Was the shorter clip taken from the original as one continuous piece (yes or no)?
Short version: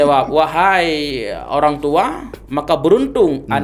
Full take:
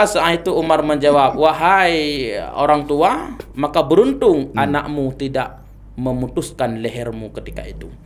yes